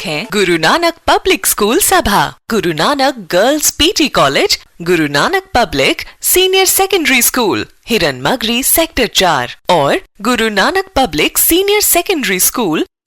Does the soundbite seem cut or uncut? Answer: uncut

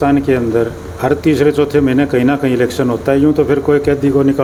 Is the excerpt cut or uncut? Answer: uncut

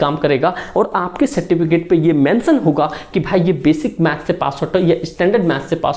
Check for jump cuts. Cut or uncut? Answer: uncut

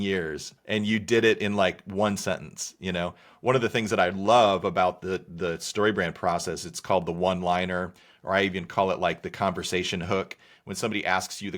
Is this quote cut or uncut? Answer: uncut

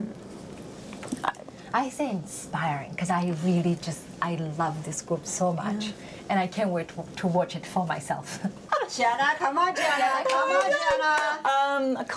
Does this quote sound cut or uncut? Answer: cut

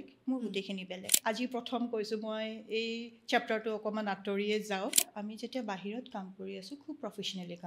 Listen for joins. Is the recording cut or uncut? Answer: cut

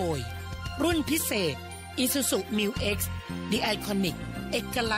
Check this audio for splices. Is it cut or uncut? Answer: uncut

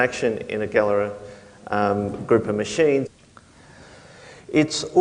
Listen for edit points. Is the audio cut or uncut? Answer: uncut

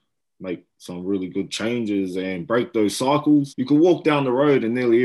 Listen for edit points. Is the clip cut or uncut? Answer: cut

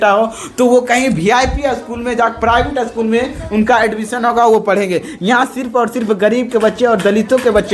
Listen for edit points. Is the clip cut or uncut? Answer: uncut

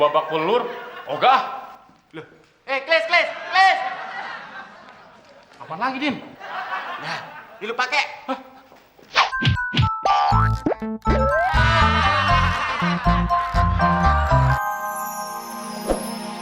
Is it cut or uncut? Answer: cut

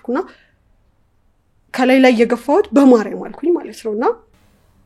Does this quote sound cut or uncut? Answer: uncut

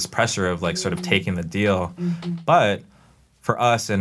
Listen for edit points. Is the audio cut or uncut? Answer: uncut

